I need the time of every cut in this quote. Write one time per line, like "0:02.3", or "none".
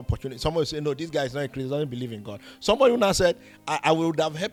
none